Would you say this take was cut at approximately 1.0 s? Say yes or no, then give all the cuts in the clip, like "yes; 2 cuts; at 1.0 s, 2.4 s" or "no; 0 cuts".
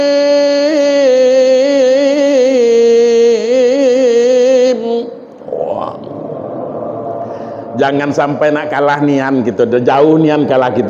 no; 0 cuts